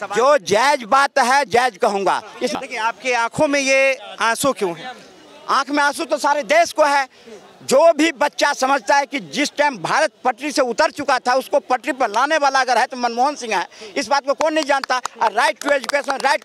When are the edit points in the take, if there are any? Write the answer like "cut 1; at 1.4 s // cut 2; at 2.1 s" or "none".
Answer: cut 1; at 2.5 s